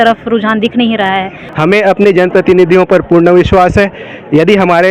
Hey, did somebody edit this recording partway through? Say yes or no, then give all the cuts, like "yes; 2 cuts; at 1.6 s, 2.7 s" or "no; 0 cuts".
yes; 1 cut; at 1.4 s